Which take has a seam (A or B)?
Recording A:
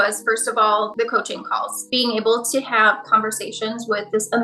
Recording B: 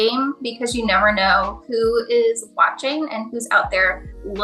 A